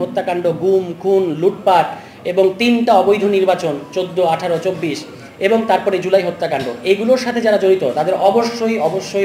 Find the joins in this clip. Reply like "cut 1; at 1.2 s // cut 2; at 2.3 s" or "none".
none